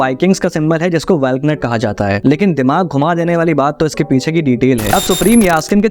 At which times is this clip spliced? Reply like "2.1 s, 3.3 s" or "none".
4.9 s